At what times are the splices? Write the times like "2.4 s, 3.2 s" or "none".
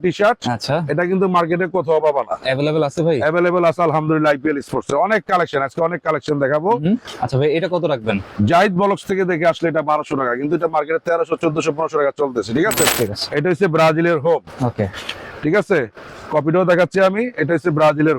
7.1 s, 8.3 s, 12.9 s

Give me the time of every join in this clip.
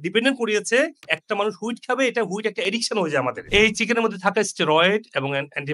3.4 s

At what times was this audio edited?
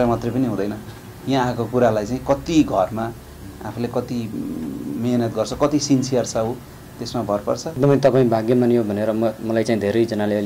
7.8 s

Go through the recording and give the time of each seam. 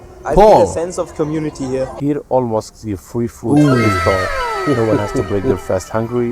1.9 s

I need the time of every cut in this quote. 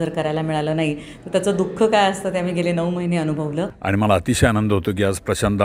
3.8 s

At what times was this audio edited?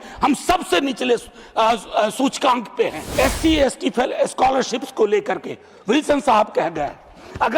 3.0 s

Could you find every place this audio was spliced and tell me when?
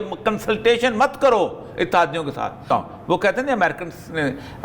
2.6 s

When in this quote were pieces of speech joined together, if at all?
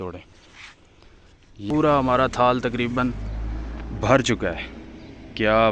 1.5 s

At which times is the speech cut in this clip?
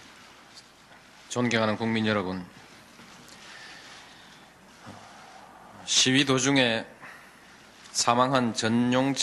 none

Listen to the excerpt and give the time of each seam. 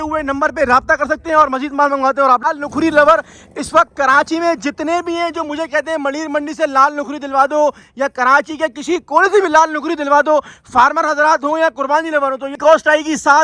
2.4 s, 12.6 s

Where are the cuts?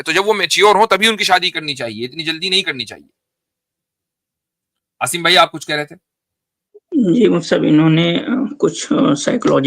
none

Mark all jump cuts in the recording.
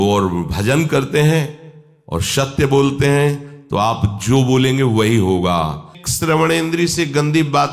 6.0 s

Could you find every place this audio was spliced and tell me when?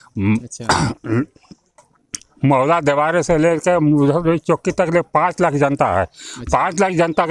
none

